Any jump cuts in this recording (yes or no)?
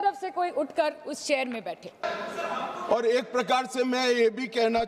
yes